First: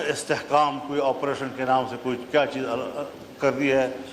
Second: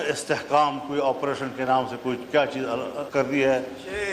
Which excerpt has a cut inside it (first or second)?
second